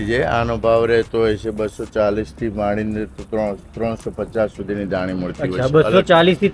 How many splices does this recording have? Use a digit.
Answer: 0